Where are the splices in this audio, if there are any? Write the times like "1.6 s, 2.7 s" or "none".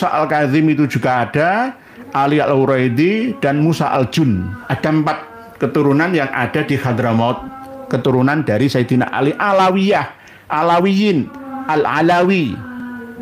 none